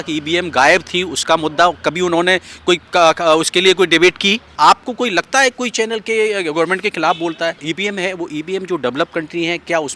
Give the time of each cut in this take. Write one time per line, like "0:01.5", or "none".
0:04.5
0:07.6